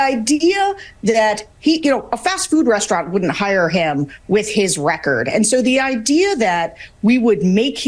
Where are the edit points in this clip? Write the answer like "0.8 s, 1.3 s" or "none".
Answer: none

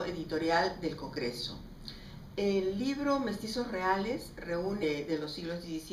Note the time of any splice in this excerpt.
none

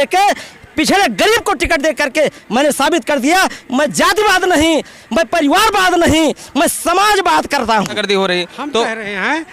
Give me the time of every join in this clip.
8.0 s

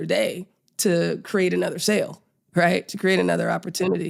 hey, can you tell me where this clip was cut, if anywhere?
none

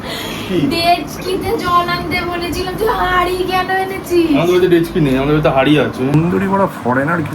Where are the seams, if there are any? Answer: 6.1 s

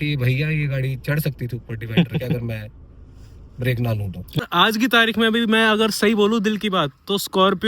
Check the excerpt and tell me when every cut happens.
4.4 s

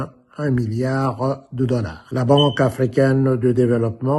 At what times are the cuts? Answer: 2.0 s

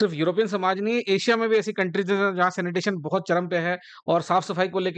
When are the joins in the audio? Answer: none

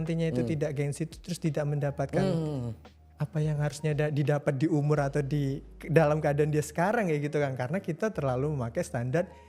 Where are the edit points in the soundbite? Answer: none

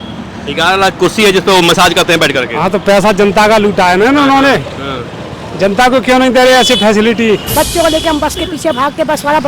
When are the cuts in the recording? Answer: 7.5 s

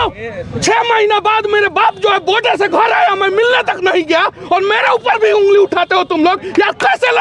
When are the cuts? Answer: none

